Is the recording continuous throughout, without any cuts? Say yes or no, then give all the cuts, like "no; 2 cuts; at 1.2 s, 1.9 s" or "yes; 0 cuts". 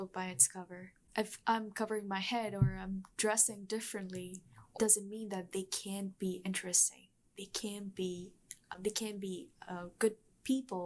no; 3 cuts; at 1.1 s, 4.8 s, 8.7 s